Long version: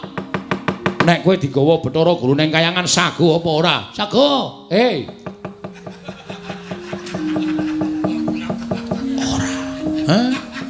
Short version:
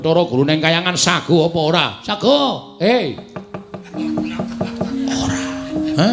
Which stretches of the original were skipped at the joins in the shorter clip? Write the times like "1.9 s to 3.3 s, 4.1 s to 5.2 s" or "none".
5.9 s to 8.1 s